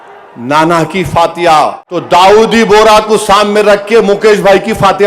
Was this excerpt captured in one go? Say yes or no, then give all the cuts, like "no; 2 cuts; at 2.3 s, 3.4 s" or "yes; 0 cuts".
no; 1 cut; at 1.9 s